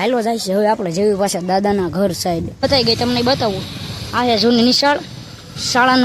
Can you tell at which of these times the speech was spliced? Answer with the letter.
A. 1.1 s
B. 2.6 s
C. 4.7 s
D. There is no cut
B